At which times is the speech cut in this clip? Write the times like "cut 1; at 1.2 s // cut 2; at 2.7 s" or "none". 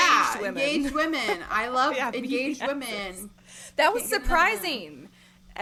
none